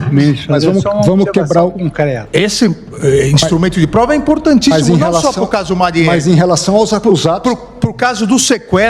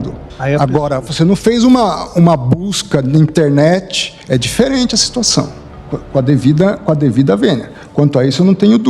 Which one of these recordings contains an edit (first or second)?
first